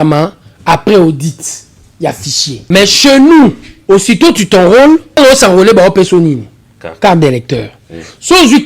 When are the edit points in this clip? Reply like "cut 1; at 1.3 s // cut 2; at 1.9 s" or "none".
cut 1; at 2.6 s // cut 2; at 3.7 s // cut 3; at 5.2 s